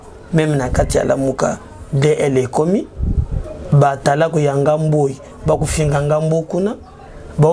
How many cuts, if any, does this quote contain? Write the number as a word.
zero